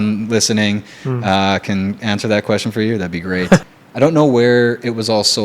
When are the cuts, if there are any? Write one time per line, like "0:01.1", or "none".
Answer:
0:03.6